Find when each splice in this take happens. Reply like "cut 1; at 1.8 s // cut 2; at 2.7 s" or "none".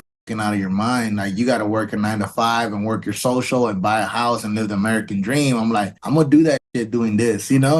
cut 1; at 6.0 s